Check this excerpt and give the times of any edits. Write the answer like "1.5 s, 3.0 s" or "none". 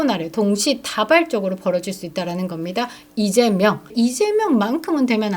3.9 s

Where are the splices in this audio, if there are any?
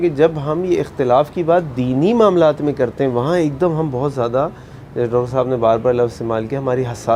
none

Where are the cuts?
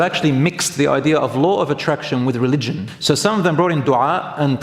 2.9 s

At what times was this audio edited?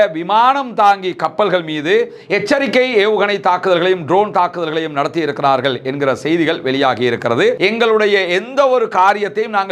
7.5 s

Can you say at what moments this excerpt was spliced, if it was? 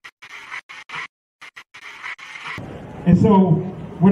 1.2 s

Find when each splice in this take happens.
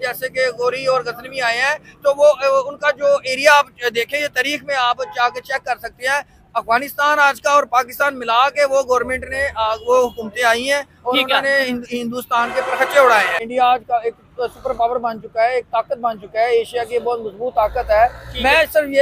13.4 s

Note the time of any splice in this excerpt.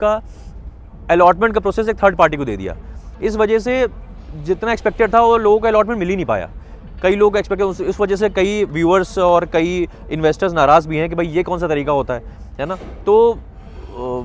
none

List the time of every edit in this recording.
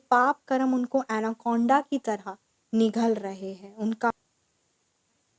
4.1 s

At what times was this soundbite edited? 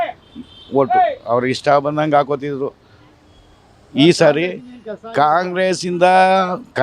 none

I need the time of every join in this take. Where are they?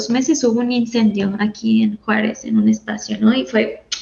none

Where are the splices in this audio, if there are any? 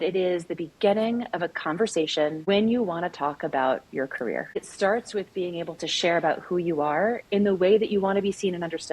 2.4 s, 4.6 s

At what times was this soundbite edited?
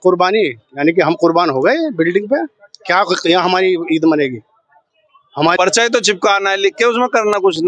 5.5 s

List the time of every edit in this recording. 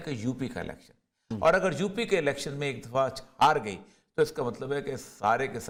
none

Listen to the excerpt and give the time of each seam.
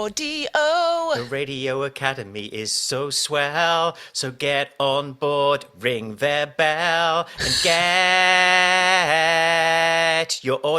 1.2 s

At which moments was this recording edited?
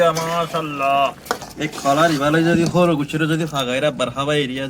1.5 s

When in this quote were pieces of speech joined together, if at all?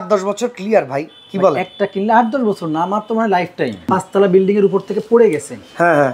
3.9 s

